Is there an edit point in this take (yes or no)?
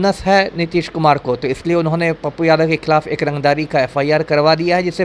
no